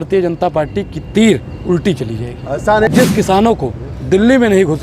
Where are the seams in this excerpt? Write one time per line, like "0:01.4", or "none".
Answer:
0:02.9